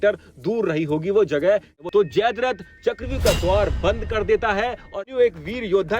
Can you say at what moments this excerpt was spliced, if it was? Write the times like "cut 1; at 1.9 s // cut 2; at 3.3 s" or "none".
cut 1; at 1.8 s // cut 2; at 5.1 s